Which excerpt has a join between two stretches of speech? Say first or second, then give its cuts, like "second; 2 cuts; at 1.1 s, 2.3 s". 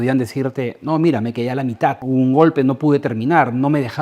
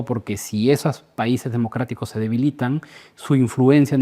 first; 1 cut; at 2.0 s